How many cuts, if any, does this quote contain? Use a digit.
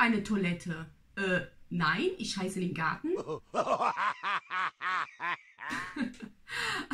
0